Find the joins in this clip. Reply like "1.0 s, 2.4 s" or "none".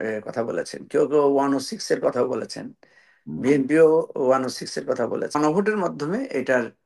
5.4 s